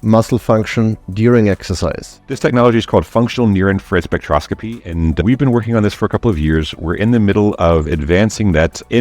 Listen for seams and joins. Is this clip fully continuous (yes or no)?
no